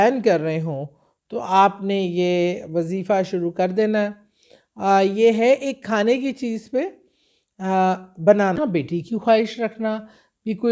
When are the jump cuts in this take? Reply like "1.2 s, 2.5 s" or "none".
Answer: 8.6 s